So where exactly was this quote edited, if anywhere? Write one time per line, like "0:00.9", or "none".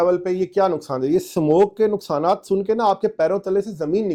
none